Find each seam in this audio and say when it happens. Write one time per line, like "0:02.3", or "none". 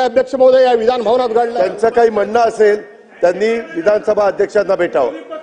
0:01.5